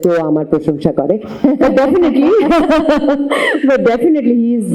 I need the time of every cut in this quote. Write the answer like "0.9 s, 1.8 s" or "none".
none